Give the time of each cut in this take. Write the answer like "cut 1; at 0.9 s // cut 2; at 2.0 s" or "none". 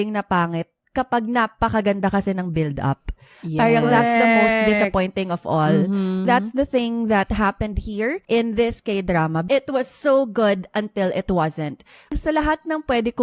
cut 1; at 6.2 s // cut 2; at 8.2 s // cut 3; at 9.4 s // cut 4; at 12.1 s